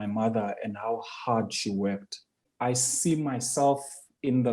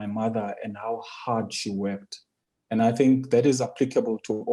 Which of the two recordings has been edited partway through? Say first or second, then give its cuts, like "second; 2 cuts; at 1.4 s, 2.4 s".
first; 1 cut; at 2.5 s